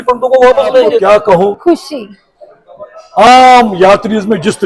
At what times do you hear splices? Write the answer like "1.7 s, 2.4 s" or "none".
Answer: 1.0 s